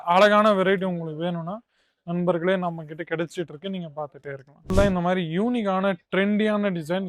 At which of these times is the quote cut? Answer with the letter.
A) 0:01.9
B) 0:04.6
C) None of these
B